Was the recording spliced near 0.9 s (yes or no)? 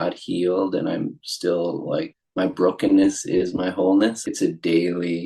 no